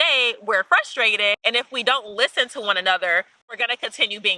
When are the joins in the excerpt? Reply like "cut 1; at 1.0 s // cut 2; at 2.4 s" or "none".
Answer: none

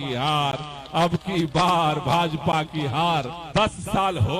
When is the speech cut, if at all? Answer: cut 1; at 3.4 s

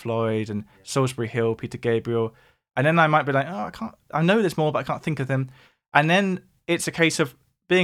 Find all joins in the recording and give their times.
none

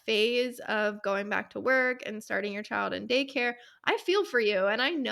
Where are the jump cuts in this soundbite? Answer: none

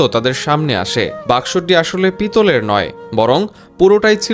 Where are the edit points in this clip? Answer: cut 1; at 1.2 s

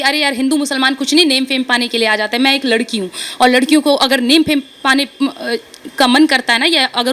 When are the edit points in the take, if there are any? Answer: none

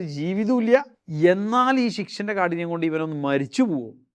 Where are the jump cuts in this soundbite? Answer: cut 1; at 1.0 s

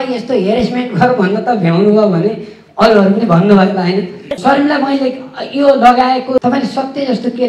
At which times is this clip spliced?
cut 1; at 4.3 s // cut 2; at 6.4 s

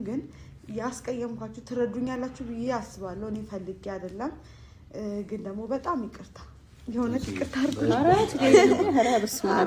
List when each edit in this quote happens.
none

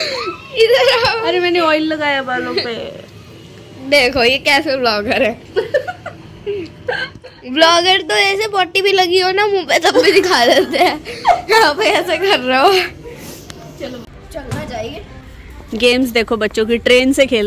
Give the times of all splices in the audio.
cut 1; at 14.1 s // cut 2; at 15.1 s

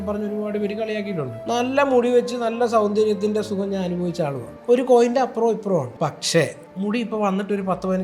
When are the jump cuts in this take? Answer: cut 1; at 1.4 s // cut 2; at 4.5 s // cut 3; at 5.9 s // cut 4; at 6.6 s

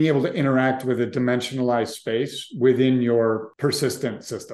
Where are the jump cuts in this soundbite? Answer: cut 1; at 3.5 s

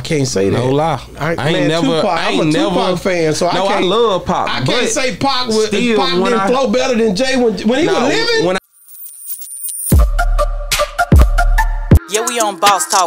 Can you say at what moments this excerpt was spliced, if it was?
cut 1; at 8.6 s

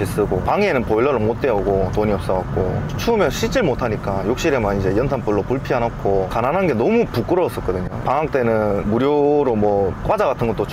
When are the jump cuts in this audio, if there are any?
none

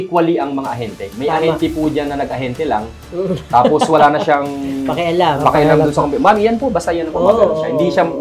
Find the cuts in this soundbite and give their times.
none

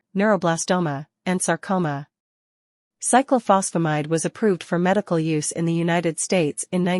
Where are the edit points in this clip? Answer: cut 1; at 0.9 s

